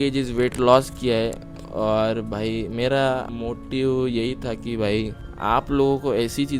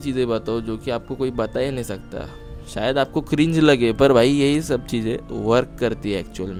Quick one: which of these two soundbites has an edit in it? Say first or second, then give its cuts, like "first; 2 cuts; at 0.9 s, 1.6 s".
first; 2 cuts; at 3.3 s, 5.2 s